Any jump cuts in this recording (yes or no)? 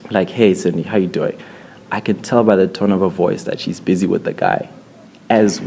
no